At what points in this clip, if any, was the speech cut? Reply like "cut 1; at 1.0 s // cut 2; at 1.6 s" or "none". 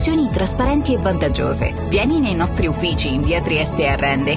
cut 1; at 1.5 s